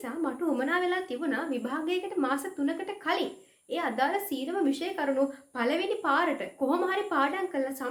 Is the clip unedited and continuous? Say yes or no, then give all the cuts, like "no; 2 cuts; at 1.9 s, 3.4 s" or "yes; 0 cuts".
yes; 0 cuts